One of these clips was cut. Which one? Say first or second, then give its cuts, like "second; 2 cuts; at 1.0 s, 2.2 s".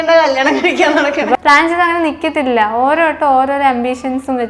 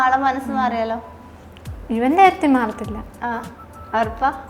first; 1 cut; at 1.4 s